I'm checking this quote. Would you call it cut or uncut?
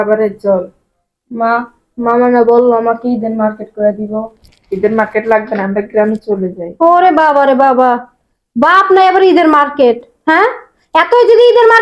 uncut